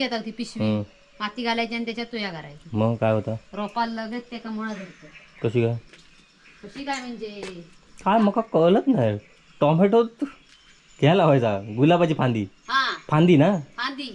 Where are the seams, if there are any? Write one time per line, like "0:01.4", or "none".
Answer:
none